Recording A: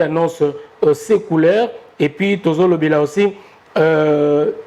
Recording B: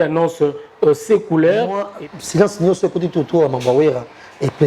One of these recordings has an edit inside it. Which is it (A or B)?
B